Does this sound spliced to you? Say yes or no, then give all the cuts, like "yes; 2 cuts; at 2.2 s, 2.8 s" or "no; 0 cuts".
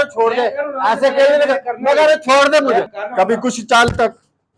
yes; 1 cut; at 3.0 s